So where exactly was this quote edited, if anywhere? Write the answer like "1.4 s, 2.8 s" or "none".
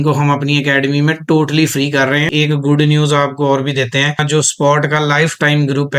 2.3 s, 4.2 s

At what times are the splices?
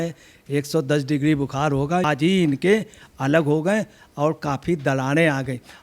2.0 s

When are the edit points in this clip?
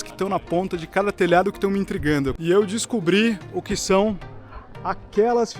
2.4 s

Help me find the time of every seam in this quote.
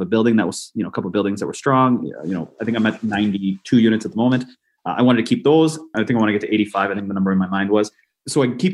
none

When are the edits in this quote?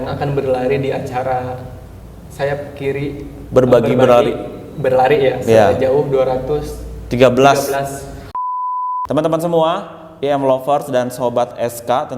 8.4 s

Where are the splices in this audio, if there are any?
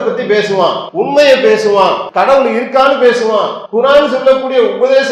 0.8 s, 2.1 s, 3.6 s

